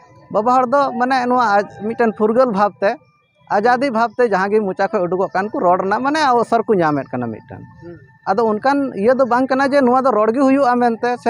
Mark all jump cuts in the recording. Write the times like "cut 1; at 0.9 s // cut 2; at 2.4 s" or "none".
none